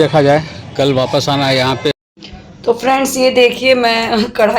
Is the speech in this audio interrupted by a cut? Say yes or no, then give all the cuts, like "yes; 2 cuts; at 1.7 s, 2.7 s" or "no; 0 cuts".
yes; 1 cut; at 1.9 s